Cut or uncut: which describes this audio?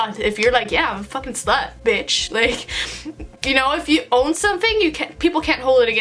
uncut